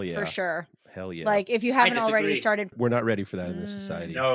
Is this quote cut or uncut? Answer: cut